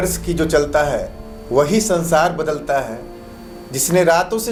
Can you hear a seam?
no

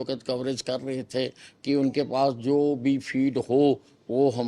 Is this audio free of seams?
yes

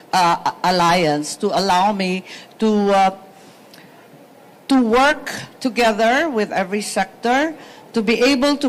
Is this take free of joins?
yes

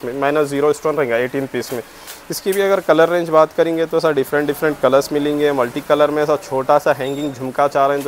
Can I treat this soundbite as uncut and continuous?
yes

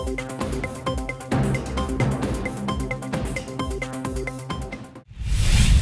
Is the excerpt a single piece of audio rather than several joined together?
no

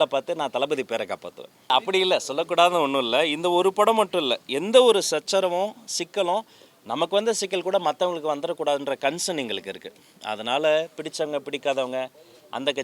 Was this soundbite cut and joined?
yes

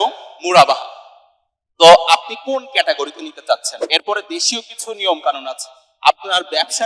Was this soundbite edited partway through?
yes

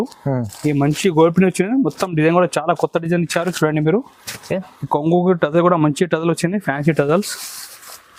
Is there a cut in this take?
no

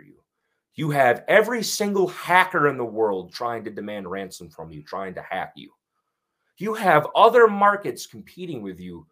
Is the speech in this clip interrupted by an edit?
no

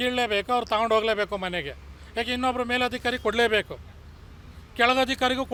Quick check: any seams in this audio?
no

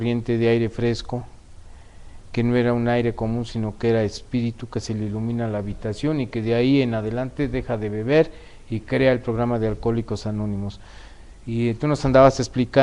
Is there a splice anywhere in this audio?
yes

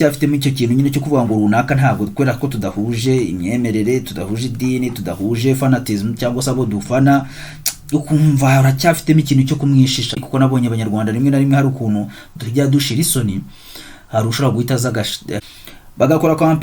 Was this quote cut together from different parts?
yes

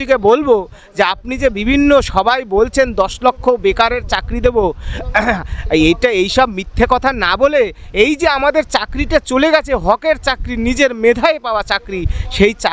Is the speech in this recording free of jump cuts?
yes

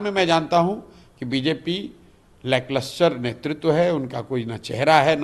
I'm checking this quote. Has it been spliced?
no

